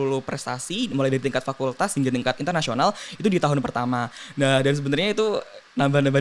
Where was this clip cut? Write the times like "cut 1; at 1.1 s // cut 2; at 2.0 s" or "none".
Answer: none